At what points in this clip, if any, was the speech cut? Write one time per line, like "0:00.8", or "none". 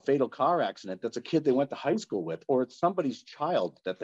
none